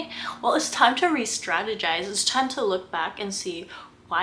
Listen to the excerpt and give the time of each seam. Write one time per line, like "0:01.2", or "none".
none

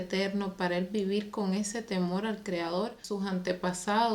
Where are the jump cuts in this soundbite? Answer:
0:03.1

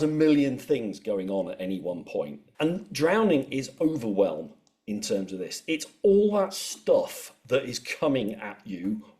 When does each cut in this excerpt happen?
0:02.4

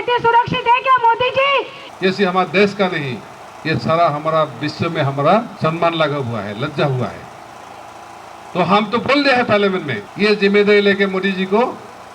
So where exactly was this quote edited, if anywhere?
0:01.8
0:05.5
0:10.0

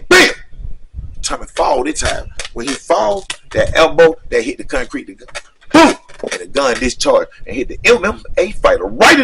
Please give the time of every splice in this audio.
none

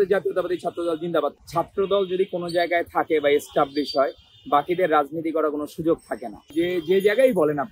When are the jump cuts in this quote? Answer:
0:01.4
0:06.5

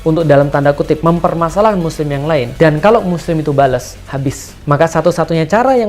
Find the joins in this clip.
0:02.5
0:04.5

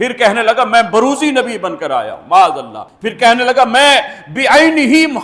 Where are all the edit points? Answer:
none

